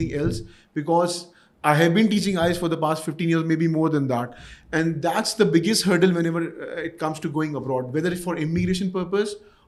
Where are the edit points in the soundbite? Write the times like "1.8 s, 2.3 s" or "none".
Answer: none